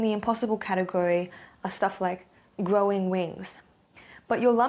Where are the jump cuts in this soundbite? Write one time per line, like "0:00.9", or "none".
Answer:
none